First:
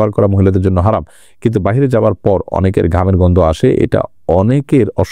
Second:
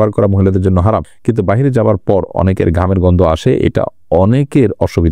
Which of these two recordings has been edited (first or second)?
second